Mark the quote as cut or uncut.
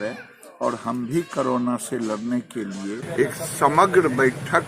cut